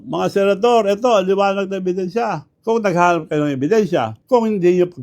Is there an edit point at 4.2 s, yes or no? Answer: yes